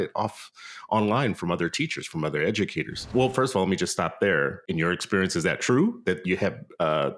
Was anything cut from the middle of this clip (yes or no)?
yes